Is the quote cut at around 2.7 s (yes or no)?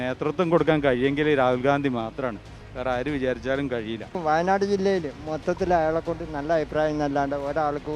no